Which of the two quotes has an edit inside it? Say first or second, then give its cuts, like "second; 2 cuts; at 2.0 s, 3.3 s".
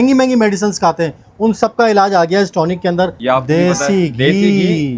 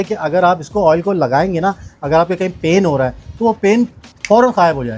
first; 1 cut; at 3.2 s